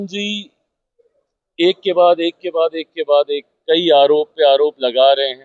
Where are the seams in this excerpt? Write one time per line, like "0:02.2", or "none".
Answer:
none